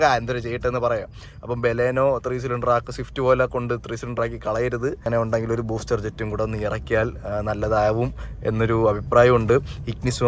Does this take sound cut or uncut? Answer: cut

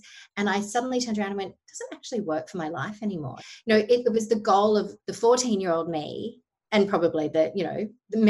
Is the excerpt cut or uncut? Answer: cut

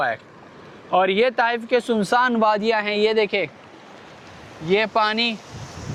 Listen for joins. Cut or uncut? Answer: uncut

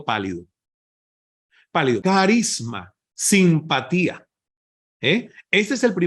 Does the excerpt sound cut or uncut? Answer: cut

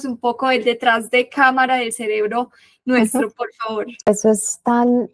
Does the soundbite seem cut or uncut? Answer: cut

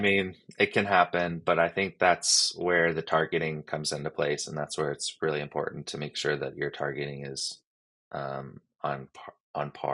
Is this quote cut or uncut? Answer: uncut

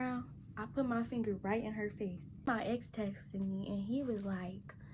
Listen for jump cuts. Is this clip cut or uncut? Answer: cut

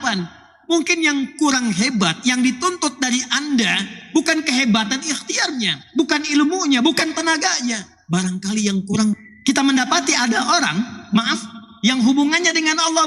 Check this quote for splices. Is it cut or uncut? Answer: cut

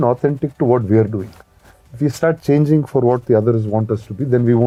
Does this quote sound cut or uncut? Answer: uncut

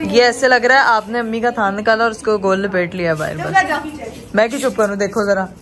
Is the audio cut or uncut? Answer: uncut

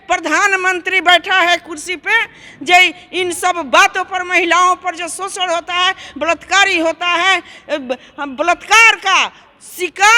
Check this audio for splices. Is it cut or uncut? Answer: uncut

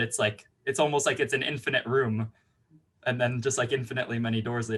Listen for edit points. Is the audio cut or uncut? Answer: uncut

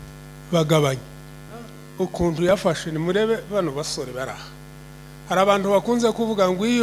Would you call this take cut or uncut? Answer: cut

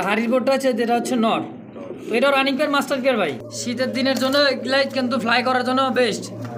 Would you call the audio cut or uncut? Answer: cut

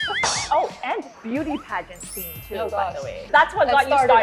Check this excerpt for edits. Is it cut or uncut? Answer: uncut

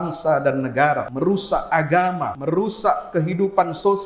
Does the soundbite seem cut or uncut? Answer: cut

